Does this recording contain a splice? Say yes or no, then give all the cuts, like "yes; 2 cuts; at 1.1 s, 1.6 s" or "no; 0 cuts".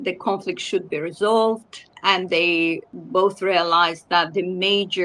yes; 2 cuts; at 1.9 s, 2.9 s